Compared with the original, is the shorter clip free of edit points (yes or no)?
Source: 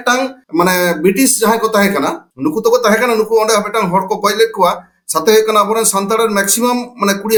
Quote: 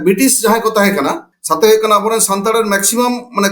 no